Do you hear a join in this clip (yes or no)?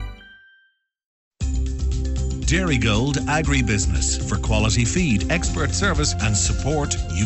yes